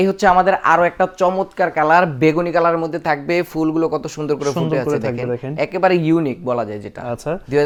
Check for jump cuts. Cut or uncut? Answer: uncut